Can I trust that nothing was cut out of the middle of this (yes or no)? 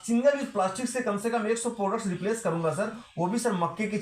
yes